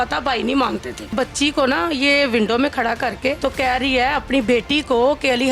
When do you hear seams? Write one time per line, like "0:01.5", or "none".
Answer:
0:01.1
0:03.4